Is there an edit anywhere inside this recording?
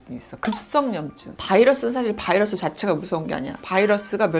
yes; 1 cut; at 1.3 s

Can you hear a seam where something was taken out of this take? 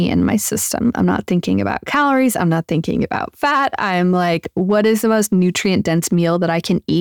no; 0 cuts

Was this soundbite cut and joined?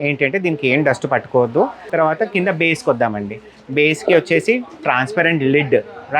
yes; 1 cut; at 1.8 s

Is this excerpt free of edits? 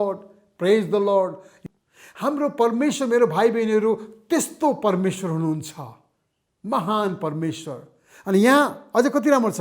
no; 1 cut; at 1.5 s

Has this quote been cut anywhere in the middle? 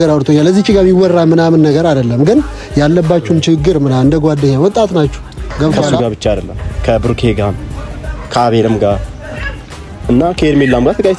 yes; 1 cut; at 5.9 s

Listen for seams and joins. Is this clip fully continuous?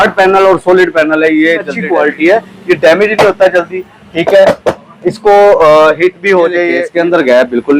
no; 2 cuts; at 1.8 s, 6.8 s

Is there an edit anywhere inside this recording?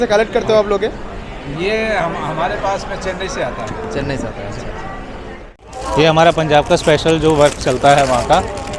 yes; 1 cut; at 5.8 s

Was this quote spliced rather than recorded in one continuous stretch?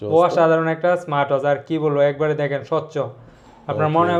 no; 0 cuts

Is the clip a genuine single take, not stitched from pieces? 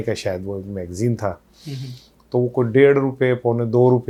yes; 0 cuts

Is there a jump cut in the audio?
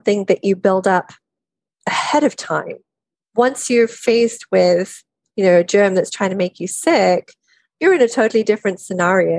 no; 0 cuts

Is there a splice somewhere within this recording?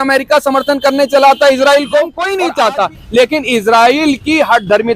yes; 1 cut; at 2.2 s

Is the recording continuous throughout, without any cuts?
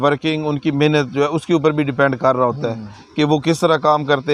yes; 0 cuts

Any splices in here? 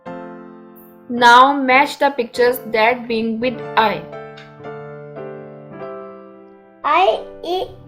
yes; 3 cuts; at 1.0 s, 4.0 s, 6.8 s

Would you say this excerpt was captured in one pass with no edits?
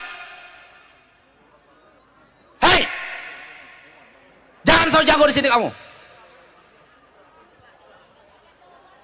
yes; 0 cuts

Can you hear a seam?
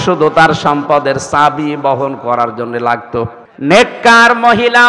yes; 1 cut; at 3.4 s

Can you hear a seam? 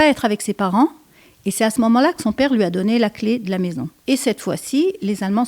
yes; 1 cut; at 3.9 s

